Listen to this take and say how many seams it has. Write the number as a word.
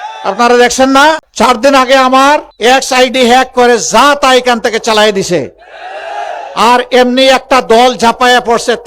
two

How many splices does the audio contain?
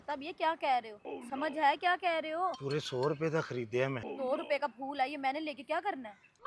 three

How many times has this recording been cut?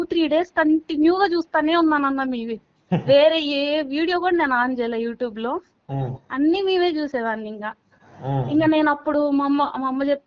zero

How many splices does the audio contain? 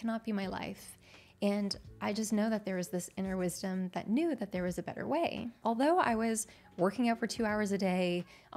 one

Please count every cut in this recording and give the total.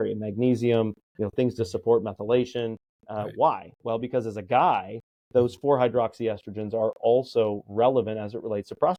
zero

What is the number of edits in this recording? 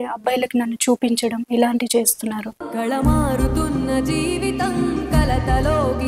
zero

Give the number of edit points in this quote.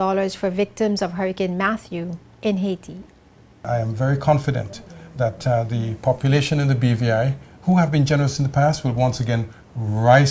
one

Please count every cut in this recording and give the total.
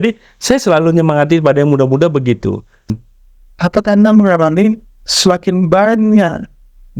one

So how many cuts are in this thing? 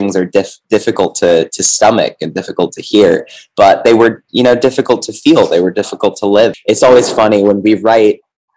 one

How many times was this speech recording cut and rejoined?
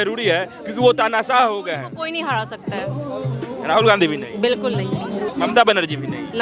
one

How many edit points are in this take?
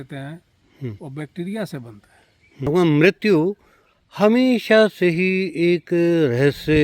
one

